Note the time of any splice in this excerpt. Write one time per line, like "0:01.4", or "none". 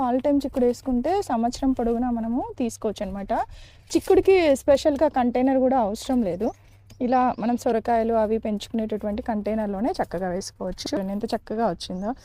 0:10.9